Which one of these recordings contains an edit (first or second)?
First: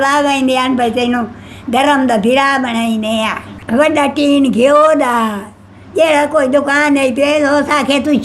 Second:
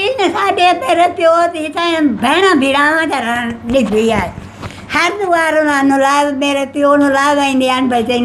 first